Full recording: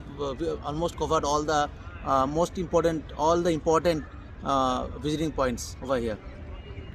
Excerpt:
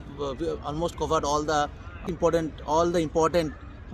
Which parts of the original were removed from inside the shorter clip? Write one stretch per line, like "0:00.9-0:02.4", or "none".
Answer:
0:02.0-0:02.5